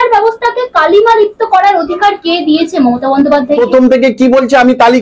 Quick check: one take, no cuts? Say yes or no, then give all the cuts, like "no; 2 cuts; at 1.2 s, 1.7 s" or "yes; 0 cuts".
no; 1 cut; at 3.6 s